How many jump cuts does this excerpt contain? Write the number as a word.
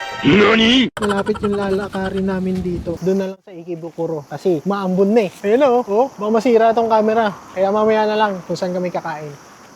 two